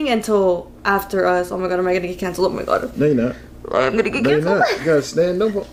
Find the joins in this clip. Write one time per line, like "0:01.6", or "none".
none